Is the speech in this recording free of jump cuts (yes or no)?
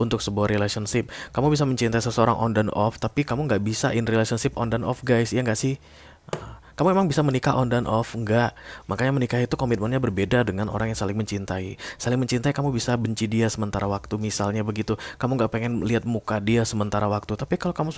yes